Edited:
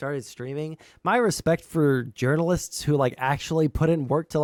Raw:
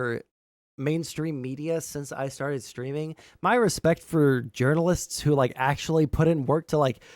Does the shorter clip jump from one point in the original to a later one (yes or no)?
no